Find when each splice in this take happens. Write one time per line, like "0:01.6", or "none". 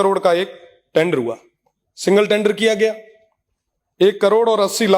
none